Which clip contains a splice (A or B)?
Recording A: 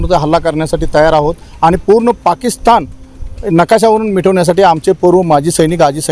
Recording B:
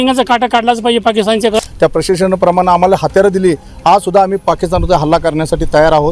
B